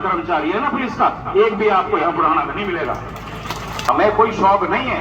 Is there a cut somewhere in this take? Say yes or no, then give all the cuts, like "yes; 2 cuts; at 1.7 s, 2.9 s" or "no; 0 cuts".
yes; 1 cut; at 3.8 s